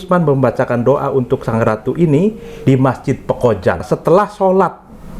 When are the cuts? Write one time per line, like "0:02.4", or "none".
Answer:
0:03.8